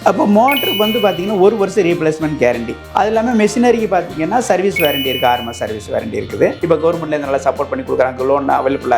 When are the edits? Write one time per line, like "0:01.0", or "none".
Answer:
0:02.8
0:06.6